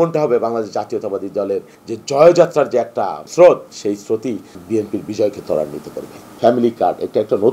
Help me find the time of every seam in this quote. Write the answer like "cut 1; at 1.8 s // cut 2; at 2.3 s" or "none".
cut 1; at 1.8 s // cut 2; at 3.2 s // cut 3; at 4.6 s // cut 4; at 6.4 s